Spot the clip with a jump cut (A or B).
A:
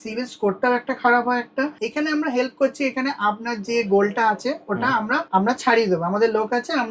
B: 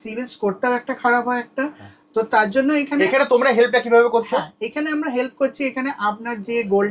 A